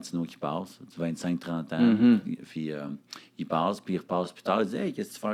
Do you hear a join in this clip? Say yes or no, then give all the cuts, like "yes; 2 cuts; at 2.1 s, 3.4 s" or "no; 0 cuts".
no; 0 cuts